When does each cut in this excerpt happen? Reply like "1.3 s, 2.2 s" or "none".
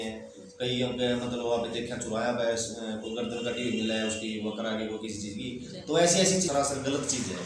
6.5 s